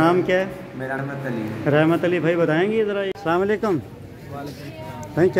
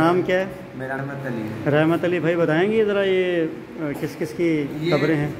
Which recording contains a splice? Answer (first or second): first